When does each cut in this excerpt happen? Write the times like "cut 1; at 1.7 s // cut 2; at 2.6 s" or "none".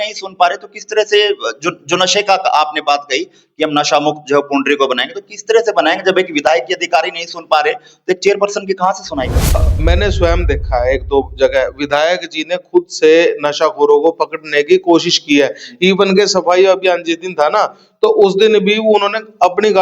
cut 1; at 9.7 s

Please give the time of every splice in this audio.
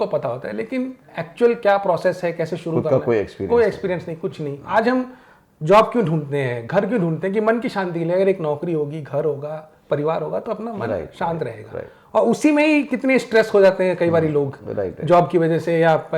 cut 1; at 4.6 s

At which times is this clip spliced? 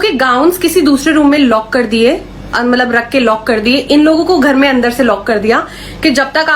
none

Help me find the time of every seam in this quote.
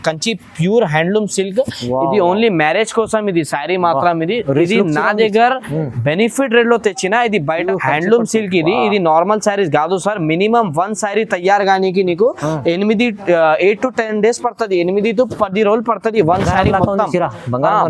cut 1; at 7.6 s

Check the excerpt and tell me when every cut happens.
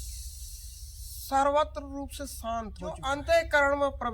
cut 1; at 3.0 s

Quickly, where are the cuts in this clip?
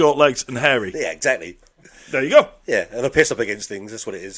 none

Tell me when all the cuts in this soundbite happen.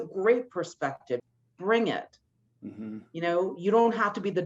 cut 1; at 1.2 s

